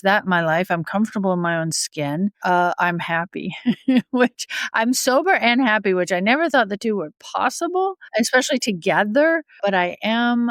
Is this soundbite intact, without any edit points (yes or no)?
no